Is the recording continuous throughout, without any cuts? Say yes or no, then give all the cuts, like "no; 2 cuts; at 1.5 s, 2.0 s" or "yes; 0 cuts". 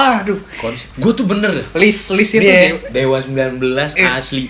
yes; 0 cuts